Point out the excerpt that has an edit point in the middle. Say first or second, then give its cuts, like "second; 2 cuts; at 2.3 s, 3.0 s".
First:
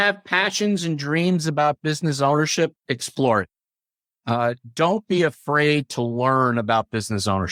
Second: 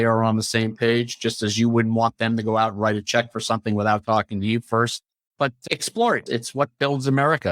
second; 1 cut; at 5.3 s